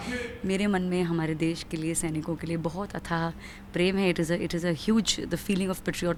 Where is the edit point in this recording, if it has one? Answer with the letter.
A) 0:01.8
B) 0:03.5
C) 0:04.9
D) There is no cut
D